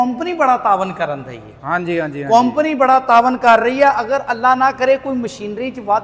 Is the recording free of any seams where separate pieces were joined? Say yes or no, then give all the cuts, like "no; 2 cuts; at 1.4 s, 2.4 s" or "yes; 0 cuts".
yes; 0 cuts